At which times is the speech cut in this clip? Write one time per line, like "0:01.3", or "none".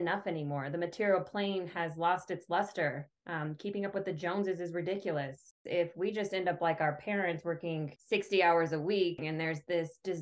0:05.6
0:07.9
0:09.3